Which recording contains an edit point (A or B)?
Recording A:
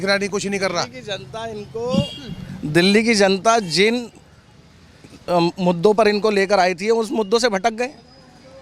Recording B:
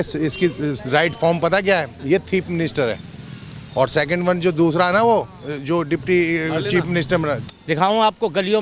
B